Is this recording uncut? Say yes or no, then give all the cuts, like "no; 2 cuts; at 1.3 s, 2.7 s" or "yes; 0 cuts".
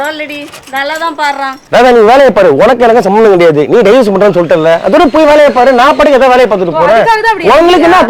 no; 1 cut; at 1.6 s